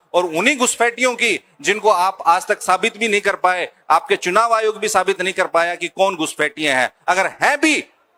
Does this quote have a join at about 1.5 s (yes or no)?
no